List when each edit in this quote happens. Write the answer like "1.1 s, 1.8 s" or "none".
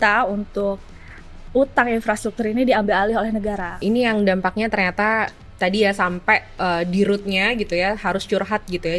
3.7 s